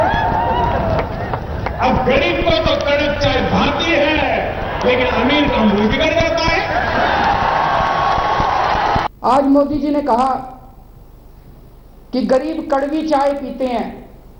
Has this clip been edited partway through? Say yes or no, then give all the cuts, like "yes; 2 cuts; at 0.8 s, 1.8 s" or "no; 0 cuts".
yes; 1 cut; at 9.1 s